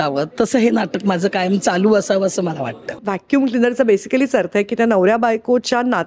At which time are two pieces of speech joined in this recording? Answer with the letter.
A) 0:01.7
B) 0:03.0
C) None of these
B